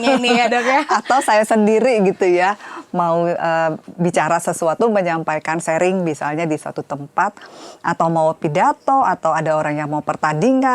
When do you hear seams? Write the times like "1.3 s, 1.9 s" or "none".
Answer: none